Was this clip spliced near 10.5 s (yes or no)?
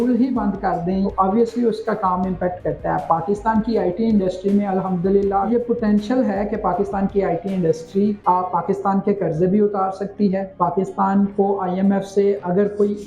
yes